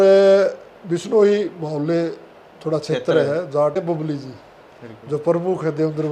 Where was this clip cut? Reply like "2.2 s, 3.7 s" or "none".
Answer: 3.8 s